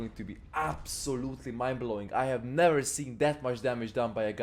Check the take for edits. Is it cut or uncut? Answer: uncut